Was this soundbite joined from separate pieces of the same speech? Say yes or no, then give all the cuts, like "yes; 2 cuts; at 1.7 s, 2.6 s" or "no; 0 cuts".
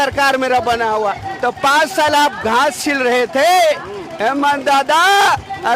no; 0 cuts